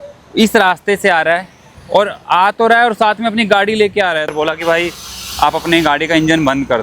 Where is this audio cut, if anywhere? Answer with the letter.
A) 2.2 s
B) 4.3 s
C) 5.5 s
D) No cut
B